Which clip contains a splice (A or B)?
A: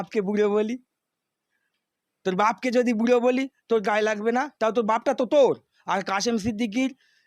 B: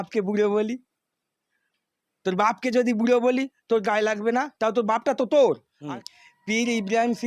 B